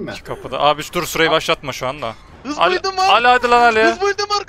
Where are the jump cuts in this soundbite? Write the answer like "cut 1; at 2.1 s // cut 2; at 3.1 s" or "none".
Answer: cut 1; at 2.3 s